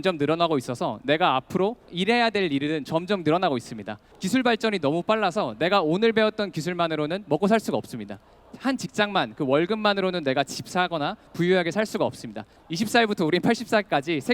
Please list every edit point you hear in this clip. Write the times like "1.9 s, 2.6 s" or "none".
1.9 s, 4.1 s, 8.4 s, 12.5 s